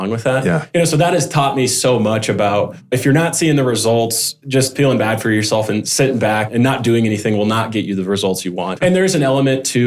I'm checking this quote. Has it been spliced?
yes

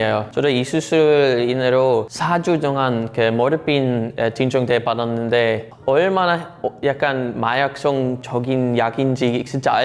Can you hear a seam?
no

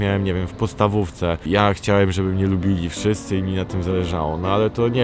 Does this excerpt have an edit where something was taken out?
yes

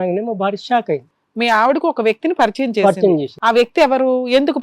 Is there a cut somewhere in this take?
yes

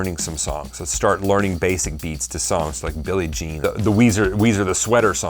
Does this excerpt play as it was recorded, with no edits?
no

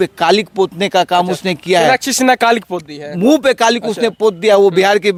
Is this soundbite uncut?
yes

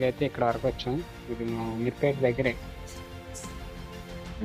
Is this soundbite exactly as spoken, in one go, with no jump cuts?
yes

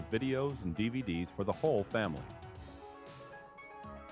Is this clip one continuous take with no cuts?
no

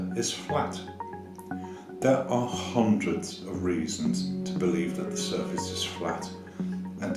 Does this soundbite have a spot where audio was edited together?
no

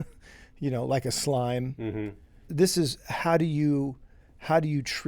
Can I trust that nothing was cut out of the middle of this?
no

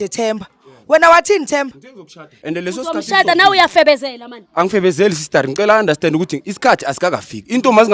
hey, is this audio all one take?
yes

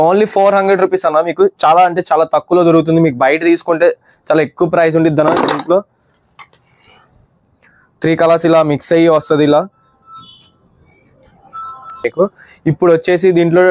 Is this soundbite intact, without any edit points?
no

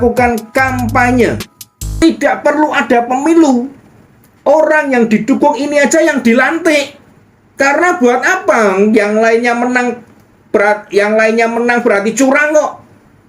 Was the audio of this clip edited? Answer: yes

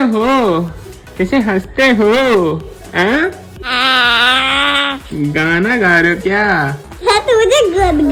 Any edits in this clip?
no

